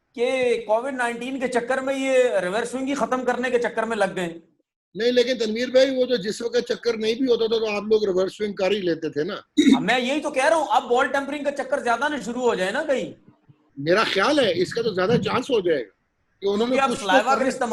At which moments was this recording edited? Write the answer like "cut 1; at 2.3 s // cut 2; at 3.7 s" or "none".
none